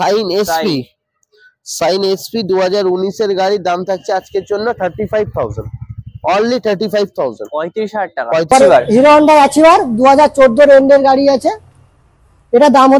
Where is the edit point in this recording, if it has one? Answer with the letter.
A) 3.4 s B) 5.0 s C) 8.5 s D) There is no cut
C